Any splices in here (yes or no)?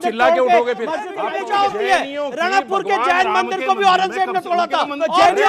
yes